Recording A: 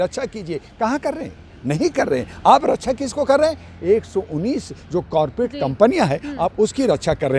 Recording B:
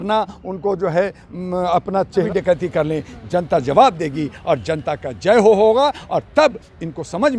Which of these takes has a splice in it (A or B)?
B